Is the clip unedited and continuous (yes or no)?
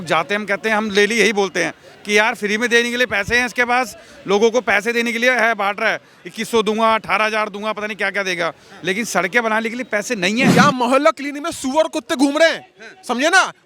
no